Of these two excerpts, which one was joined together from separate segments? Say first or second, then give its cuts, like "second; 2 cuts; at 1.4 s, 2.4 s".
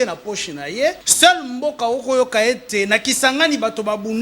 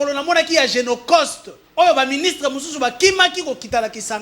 first; 1 cut; at 1.1 s